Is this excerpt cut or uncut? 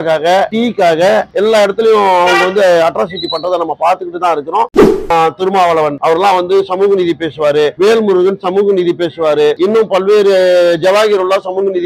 cut